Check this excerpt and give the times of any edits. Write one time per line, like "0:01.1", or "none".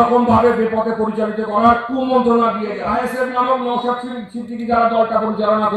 0:02.8

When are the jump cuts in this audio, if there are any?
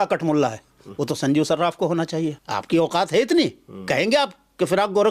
0:02.4

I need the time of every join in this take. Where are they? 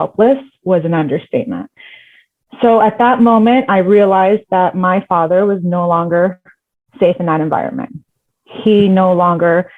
none

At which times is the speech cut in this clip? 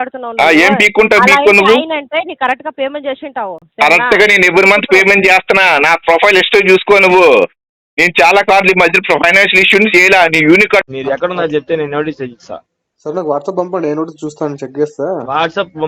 0:10.9

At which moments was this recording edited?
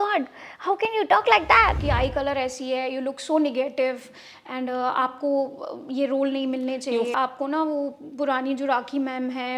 0:01.8
0:07.1

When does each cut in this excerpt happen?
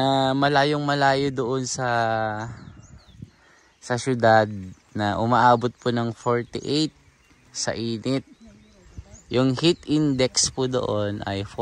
none

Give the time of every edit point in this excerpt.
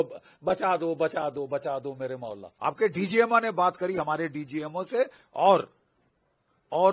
0:02.5

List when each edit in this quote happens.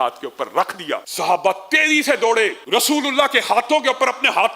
0:01.1
0:02.6

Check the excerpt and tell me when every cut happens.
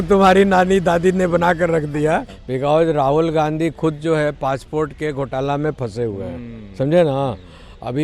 0:02.4

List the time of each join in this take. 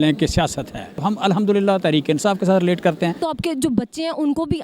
0:01.0
0:03.2

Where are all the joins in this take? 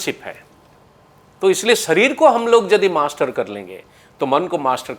none

